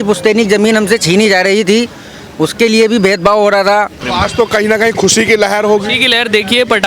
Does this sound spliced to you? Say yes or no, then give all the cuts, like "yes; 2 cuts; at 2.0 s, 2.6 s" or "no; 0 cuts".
yes; 1 cut; at 4.0 s